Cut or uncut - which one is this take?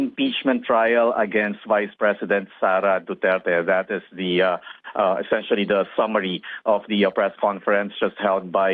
cut